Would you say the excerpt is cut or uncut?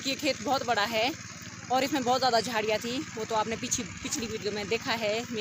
uncut